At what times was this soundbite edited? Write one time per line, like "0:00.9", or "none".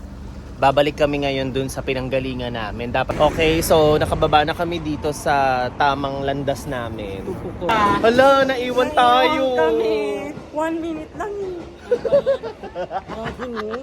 0:03.1
0:07.7